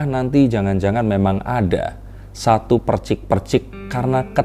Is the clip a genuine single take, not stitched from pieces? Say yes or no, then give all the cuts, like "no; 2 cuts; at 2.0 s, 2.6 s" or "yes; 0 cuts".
yes; 0 cuts